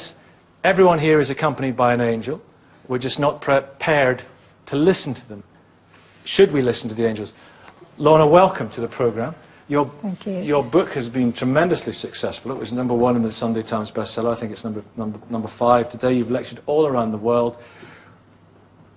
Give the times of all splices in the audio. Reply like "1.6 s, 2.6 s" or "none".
12.5 s